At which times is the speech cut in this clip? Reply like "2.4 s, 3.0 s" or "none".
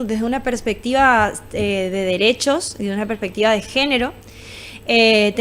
none

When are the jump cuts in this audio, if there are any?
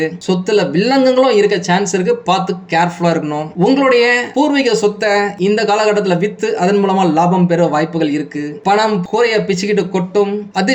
9.0 s

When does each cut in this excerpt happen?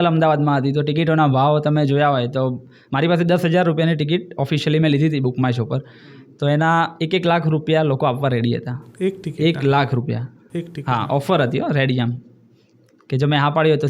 none

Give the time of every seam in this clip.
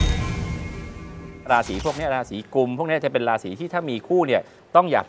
1.5 s

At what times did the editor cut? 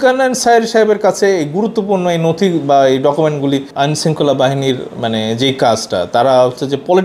3.7 s

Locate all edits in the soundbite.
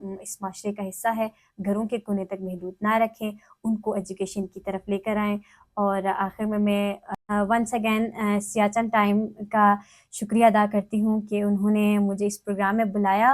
none

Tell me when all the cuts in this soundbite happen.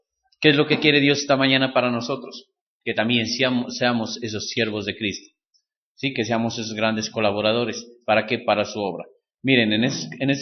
7.1 s

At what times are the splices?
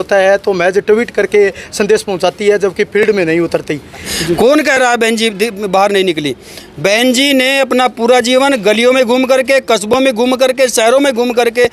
4.1 s

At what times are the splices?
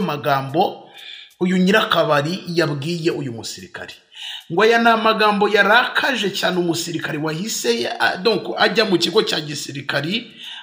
none

